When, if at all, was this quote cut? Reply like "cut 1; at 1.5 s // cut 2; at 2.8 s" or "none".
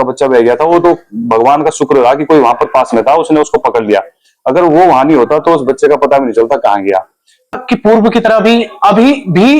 cut 1; at 7.6 s